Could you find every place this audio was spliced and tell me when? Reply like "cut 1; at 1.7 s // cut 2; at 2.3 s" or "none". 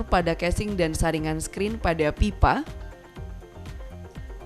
cut 1; at 2.7 s